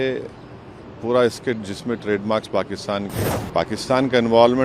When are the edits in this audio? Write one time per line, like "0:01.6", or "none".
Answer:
0:03.2